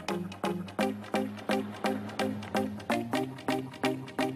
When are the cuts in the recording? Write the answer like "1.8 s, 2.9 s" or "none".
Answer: none